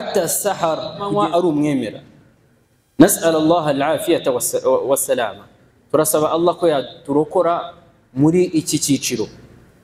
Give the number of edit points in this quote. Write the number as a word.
one